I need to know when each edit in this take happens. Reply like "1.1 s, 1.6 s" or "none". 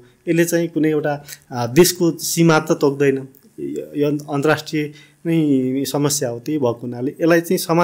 none